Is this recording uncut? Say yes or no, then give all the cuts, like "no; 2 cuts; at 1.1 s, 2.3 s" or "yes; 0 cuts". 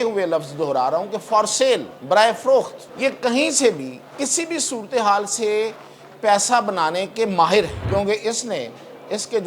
no; 3 cuts; at 1.9 s, 2.8 s, 7.8 s